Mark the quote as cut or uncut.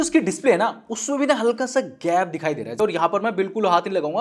cut